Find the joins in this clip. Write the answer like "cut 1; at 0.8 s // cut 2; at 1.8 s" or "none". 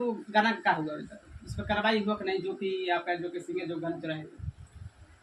none